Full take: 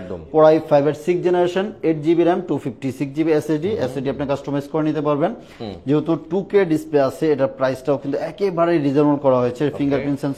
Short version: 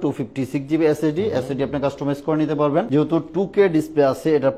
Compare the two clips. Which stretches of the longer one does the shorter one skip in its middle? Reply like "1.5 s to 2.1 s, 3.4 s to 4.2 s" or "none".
5.3 s to 5.8 s